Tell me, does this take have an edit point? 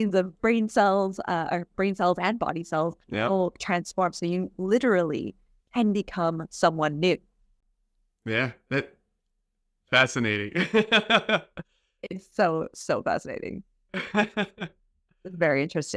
no; 0 cuts

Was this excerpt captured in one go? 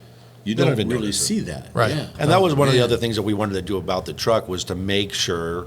no; 1 cut; at 2.1 s

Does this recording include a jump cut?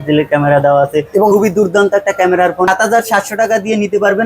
yes; 1 cut; at 2.7 s

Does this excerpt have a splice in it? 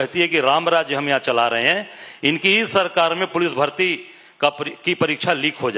no; 0 cuts

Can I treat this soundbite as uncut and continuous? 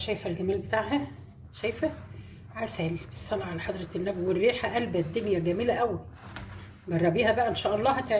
yes; 0 cuts

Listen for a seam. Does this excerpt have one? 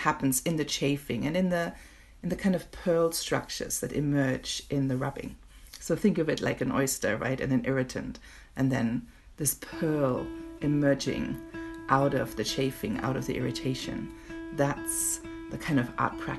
no; 0 cuts

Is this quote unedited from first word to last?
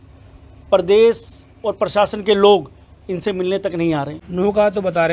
no; 1 cut; at 4.2 s

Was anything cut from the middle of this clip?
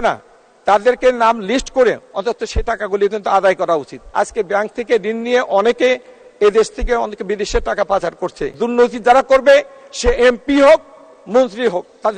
yes; 2 cuts; at 4.0 s, 8.5 s

